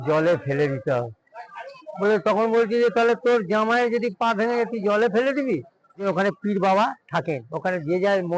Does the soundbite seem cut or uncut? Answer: cut